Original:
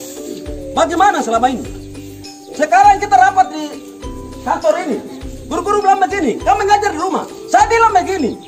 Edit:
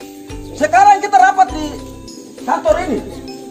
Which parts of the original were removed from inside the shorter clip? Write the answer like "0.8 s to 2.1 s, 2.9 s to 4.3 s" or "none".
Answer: none